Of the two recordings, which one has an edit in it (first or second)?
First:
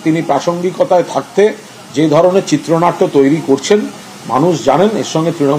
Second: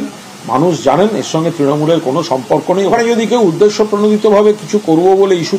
second